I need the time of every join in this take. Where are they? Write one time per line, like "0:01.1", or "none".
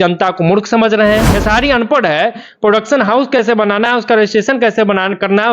0:01.3